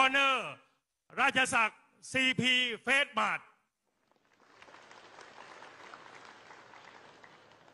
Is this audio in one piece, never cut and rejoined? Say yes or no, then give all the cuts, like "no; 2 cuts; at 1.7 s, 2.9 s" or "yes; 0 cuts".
no; 1 cut; at 4.9 s